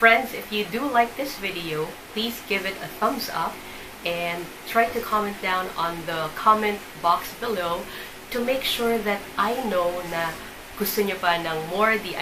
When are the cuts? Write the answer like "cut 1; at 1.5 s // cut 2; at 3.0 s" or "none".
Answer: none